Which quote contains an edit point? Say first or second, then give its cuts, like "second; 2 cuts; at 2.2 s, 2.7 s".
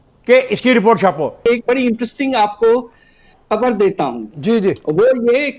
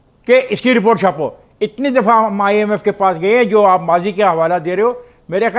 first; 1 cut; at 1.4 s